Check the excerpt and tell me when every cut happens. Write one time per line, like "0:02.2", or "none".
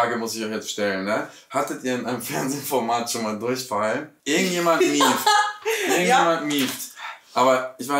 0:04.1